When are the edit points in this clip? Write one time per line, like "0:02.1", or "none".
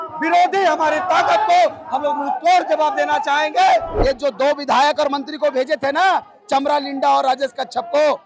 0:03.9